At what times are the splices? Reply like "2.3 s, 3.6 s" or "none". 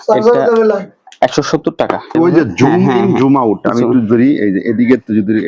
2.1 s